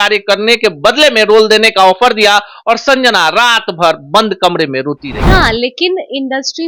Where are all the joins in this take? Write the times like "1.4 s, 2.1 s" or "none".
5.2 s